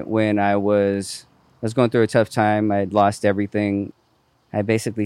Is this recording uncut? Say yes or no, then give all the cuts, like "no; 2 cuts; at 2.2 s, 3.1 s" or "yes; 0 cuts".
no; 1 cut; at 3.9 s